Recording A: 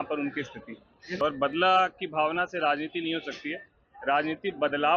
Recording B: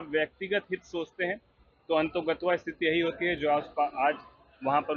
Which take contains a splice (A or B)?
A